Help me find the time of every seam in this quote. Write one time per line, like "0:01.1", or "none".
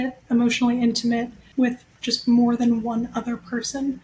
0:01.4